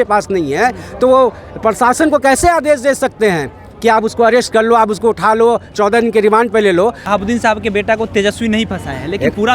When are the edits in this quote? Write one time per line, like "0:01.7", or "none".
0:07.0